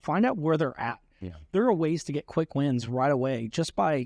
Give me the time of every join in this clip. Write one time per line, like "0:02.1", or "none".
none